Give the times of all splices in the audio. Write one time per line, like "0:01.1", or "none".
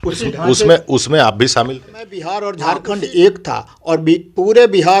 0:02.4